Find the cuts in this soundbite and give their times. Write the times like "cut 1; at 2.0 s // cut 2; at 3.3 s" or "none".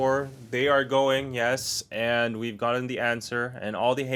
none